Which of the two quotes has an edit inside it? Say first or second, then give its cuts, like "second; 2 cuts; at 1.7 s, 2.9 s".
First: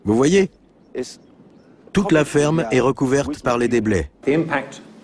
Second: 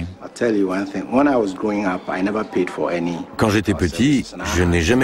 first; 1 cut; at 4.1 s